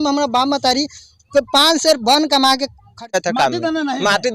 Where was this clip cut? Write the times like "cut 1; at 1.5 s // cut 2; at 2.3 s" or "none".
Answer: cut 1; at 3.1 s